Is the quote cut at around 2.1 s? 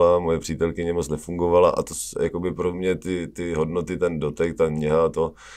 no; 0 cuts

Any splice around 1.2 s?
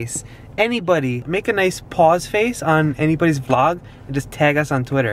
yes; 1 cut; at 1.2 s

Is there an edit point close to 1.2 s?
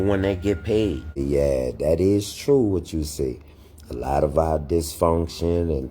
yes; 1 cut; at 1.2 s

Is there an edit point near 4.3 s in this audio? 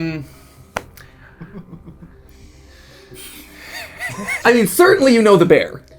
yes; 1 cut; at 4.3 s

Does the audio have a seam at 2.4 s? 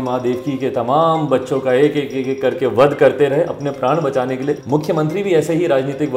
no; 1 cut; at 4.6 s

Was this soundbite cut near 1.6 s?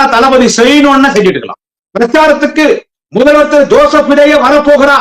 yes; 1 cut; at 1.6 s

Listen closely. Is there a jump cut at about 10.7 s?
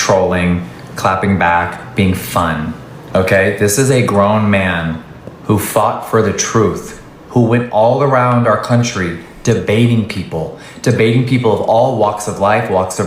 no; 1 cut; at 2.9 s

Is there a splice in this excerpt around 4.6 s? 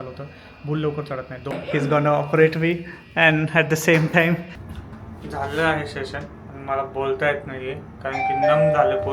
yes; 2 cuts; at 1.5 s, 4.6 s

